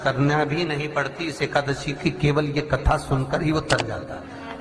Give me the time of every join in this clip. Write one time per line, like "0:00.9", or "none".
none

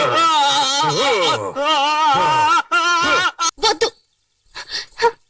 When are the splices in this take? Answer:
0:03.4

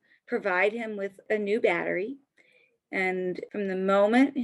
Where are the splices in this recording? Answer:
0:01.2
0:03.4

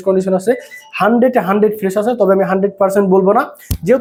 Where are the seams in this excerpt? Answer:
none

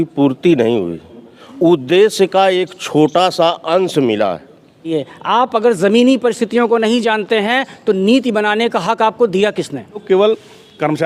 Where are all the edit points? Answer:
0:04.9
0:10.0

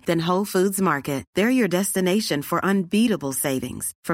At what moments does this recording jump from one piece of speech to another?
none

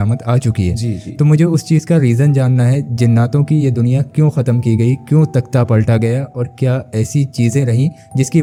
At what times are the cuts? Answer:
none

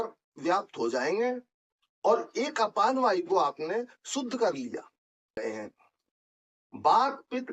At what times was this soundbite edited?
0:05.4

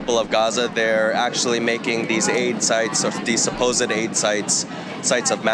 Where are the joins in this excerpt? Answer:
none

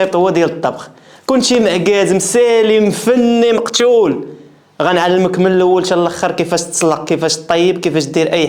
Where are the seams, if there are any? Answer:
none

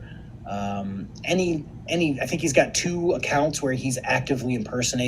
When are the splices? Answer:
0:01.8

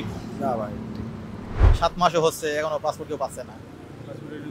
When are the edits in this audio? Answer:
0:01.5

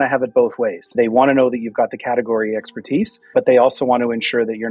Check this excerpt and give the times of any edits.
0:00.9
0:03.3

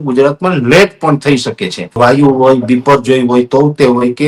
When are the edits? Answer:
0:01.9

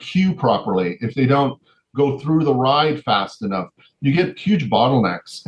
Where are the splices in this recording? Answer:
none

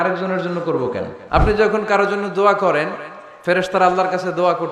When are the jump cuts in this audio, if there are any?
0:01.1

